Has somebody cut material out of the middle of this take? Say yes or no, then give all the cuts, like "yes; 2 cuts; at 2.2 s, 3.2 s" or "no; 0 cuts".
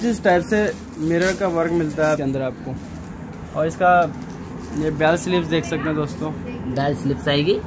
yes; 1 cut; at 2.2 s